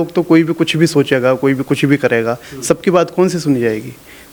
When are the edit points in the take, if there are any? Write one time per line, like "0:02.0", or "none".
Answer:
none